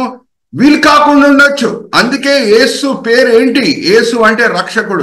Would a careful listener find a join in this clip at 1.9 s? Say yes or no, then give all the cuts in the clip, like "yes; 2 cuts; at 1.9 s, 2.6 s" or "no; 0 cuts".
no; 0 cuts